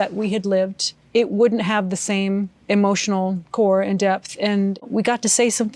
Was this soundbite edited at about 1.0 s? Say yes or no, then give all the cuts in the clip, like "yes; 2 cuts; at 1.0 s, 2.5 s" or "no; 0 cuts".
yes; 2 cuts; at 1.0 s, 4.9 s